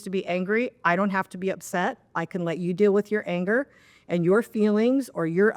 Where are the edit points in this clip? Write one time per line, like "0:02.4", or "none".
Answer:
none